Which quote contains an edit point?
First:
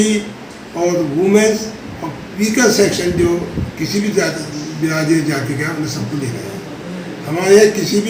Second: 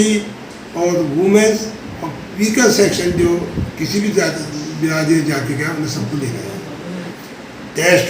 second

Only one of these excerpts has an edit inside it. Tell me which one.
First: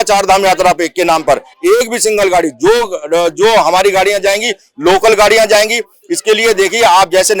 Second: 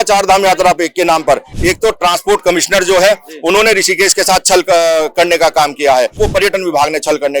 second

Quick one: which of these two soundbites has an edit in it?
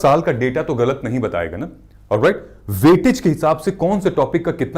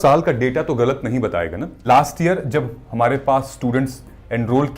second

